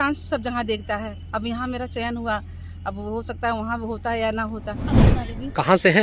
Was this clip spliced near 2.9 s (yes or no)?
no